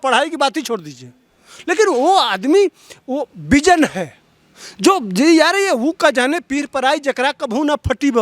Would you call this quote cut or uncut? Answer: uncut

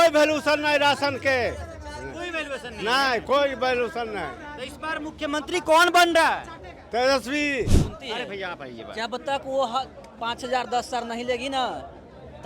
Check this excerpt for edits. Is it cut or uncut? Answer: cut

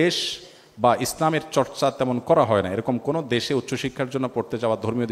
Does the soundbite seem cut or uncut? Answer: uncut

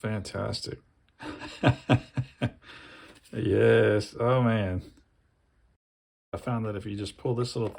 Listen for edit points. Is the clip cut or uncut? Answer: cut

